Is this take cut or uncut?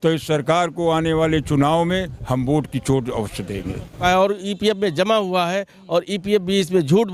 cut